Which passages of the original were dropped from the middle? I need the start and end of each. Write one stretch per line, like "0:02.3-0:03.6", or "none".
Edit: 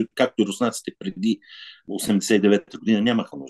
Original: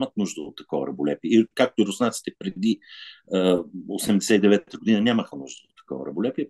0:03.2-0:03.8